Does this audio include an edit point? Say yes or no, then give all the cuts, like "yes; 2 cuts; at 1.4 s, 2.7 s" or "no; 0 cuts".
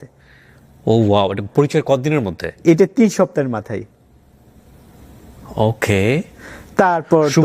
no; 0 cuts